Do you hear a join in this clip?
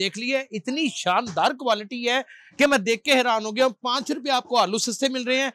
no; 0 cuts

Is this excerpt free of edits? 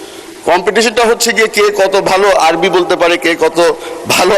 yes; 0 cuts

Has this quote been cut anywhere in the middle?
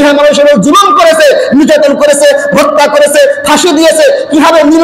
no; 0 cuts

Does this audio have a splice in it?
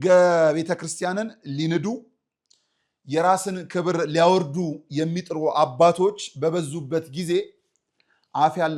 no; 0 cuts

